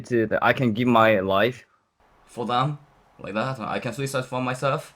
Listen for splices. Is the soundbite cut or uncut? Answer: uncut